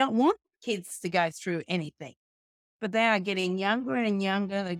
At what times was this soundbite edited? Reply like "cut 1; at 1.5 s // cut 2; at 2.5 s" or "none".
none